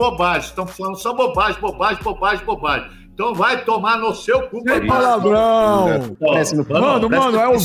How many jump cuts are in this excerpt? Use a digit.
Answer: 1